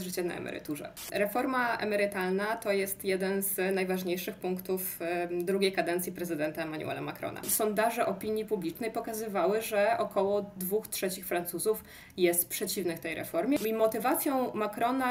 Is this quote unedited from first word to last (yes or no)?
no